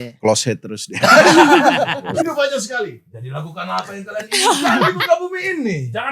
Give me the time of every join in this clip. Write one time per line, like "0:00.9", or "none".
0:02.1